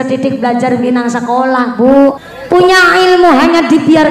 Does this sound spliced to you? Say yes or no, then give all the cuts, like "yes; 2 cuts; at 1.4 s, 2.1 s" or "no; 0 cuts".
yes; 1 cut; at 2.3 s